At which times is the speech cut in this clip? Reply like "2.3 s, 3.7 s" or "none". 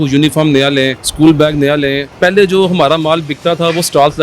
1.0 s, 2.1 s